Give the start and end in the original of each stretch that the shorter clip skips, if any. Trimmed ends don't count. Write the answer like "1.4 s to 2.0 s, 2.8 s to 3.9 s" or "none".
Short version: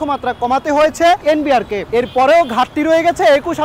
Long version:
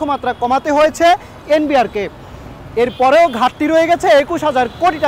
1.3 s to 2.2 s